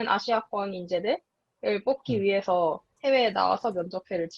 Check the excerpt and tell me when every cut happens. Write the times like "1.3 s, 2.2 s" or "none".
2.9 s

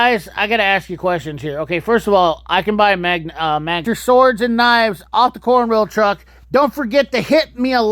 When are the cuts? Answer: 3.9 s

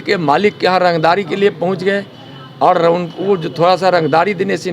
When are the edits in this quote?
none

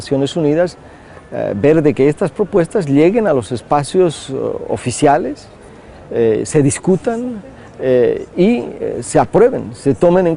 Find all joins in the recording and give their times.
none

